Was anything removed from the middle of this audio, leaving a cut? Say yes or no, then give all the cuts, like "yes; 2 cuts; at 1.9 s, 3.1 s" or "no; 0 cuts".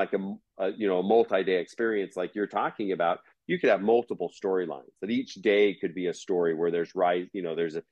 no; 0 cuts